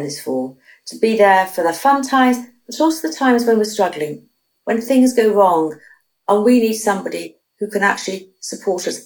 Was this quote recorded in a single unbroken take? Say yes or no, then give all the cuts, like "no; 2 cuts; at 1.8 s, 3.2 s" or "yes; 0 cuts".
yes; 0 cuts